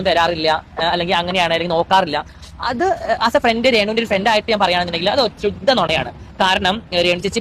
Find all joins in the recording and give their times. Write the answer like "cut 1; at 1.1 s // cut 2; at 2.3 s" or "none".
none